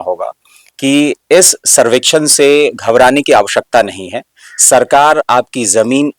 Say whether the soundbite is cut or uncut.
uncut